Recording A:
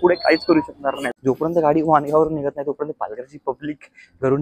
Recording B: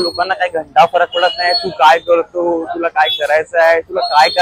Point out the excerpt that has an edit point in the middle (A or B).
A